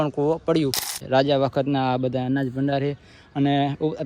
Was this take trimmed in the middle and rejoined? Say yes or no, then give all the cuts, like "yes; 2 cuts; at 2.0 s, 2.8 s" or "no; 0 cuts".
yes; 1 cut; at 1.0 s